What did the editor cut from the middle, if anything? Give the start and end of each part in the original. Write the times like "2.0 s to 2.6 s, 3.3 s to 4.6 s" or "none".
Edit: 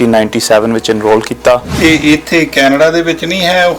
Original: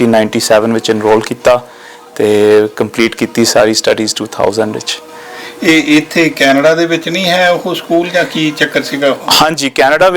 1.7 s to 5.5 s